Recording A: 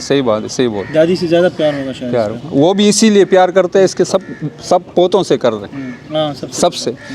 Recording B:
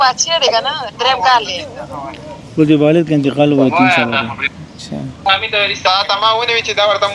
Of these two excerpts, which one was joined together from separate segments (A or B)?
B